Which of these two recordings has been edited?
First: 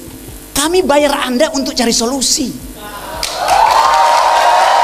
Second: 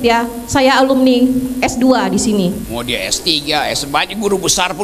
second; 1 cut; at 2.6 s

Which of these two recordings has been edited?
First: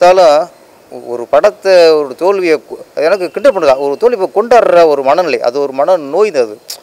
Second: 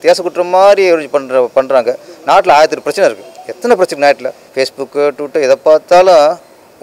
second; 1 cut; at 4.4 s

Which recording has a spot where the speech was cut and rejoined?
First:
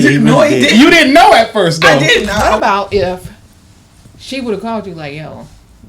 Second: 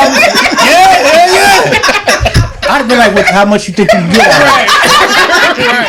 first; 1 cut; at 2.4 s

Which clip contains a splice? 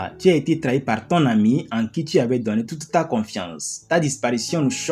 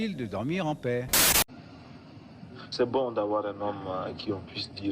second; 1 cut; at 1.2 s

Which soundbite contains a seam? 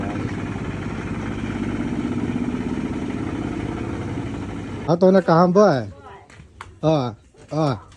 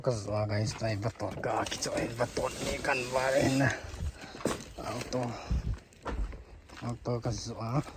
first; 1 cut; at 4.8 s

